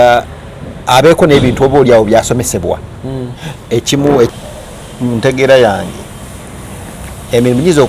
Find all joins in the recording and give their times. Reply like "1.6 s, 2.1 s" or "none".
4.3 s

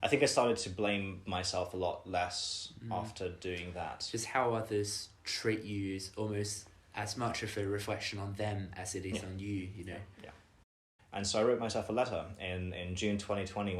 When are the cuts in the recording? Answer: 10.7 s

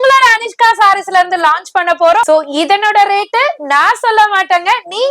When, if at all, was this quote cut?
2.3 s

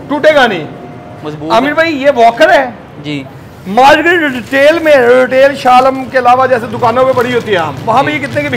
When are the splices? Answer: none

